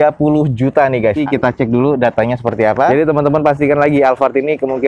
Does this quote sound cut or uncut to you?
cut